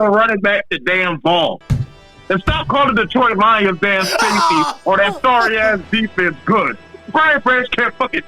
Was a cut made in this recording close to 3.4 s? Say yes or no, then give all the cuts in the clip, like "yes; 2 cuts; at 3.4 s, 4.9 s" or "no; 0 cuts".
no; 1 cut; at 1.7 s